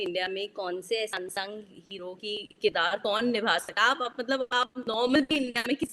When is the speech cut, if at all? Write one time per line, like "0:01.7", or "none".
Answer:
none